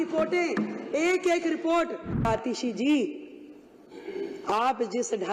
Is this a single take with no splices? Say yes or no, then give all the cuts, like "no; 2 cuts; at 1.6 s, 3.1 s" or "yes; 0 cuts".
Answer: no; 1 cut; at 2.3 s